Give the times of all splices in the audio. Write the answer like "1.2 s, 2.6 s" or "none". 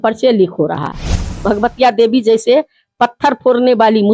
1.3 s